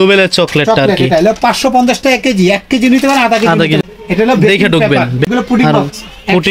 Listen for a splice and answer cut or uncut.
cut